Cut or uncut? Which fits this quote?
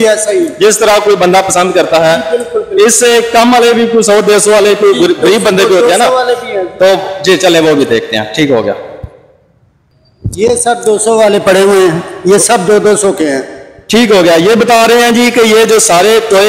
uncut